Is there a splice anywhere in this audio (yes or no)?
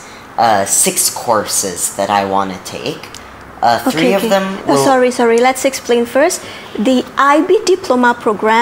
no